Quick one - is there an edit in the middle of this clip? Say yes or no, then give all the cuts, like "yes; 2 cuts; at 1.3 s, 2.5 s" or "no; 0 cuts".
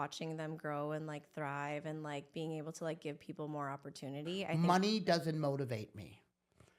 yes; 1 cut; at 4.5 s